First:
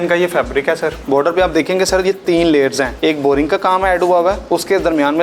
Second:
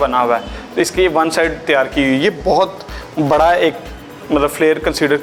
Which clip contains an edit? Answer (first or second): first